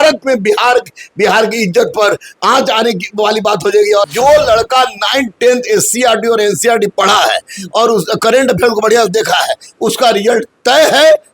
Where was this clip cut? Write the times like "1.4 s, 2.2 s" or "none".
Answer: 4.0 s